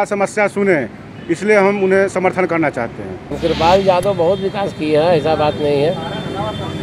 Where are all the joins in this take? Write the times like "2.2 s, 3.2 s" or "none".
3.3 s